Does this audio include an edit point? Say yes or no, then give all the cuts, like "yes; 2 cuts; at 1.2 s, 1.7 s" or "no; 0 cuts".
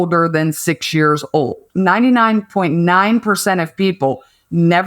yes; 1 cut; at 1.6 s